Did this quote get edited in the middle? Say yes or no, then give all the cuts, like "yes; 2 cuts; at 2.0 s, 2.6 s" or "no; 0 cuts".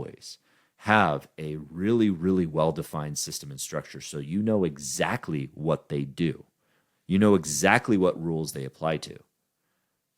no; 0 cuts